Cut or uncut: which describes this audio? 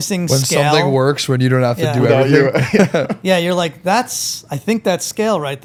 uncut